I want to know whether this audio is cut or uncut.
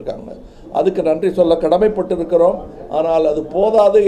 uncut